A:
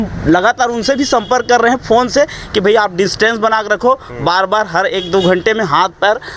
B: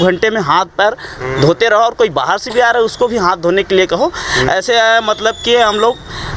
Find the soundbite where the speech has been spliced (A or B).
A